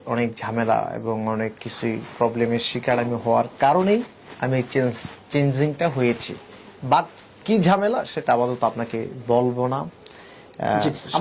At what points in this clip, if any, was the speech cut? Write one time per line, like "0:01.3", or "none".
none